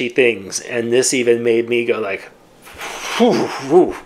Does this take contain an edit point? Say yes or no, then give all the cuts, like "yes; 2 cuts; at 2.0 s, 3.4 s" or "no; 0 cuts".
no; 0 cuts